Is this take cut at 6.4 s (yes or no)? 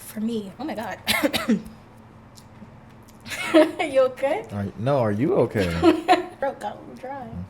yes